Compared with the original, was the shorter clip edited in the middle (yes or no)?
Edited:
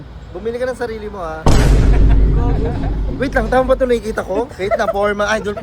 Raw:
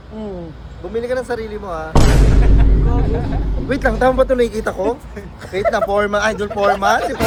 yes